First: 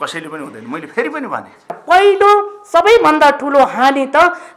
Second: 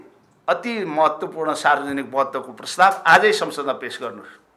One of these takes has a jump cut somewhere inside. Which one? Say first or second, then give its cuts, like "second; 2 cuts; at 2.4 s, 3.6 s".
first; 1 cut; at 1.8 s